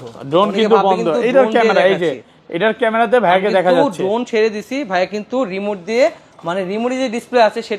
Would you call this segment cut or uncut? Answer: uncut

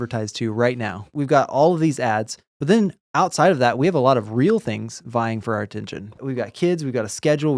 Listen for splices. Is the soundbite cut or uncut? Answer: cut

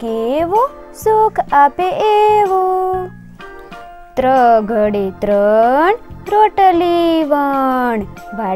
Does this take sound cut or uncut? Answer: uncut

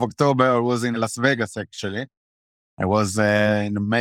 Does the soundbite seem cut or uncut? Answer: uncut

